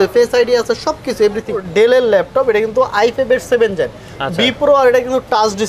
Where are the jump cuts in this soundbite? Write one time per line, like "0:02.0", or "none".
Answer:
0:01.6

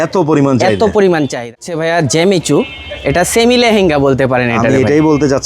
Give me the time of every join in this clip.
0:01.1

